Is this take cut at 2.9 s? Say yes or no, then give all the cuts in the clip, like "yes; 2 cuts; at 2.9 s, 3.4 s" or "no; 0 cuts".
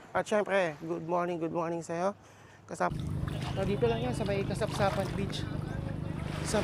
yes; 1 cut; at 2.9 s